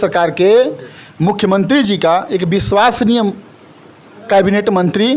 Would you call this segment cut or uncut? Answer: uncut